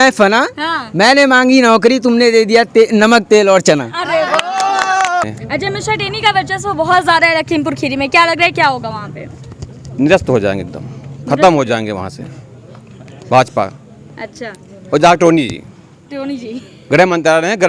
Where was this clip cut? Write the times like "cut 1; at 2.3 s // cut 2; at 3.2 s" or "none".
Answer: cut 1; at 5.2 s